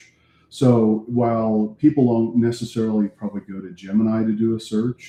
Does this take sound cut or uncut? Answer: uncut